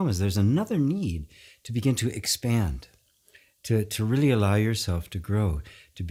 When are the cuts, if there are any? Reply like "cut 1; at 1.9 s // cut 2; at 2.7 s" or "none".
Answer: none